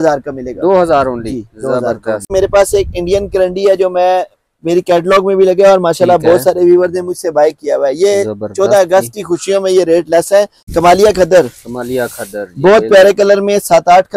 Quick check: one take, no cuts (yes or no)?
no